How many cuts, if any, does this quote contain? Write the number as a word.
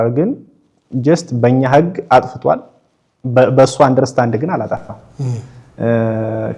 zero